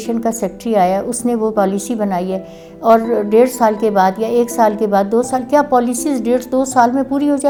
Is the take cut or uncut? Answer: uncut